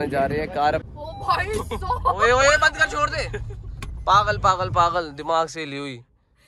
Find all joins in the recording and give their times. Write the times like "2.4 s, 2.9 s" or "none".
0.9 s